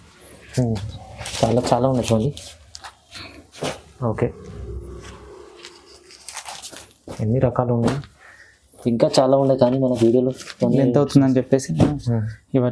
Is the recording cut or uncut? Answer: uncut